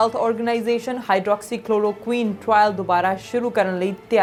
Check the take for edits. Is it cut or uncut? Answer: uncut